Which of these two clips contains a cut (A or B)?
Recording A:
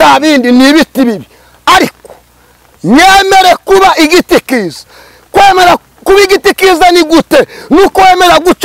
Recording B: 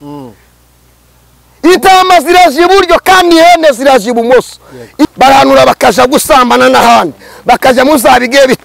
B